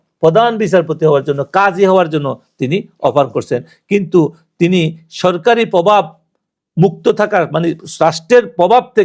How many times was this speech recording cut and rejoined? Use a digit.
0